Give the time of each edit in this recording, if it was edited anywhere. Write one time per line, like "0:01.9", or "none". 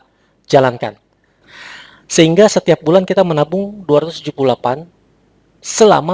0:01.5